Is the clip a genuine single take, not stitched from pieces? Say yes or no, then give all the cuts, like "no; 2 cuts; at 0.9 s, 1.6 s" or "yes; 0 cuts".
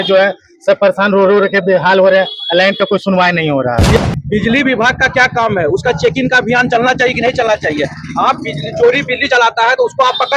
no; 1 cut; at 4.0 s